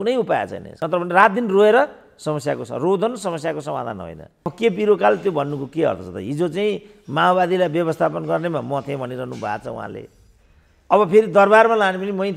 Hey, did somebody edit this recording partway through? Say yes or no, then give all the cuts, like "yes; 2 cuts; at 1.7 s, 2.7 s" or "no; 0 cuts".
yes; 2 cuts; at 0.8 s, 4.5 s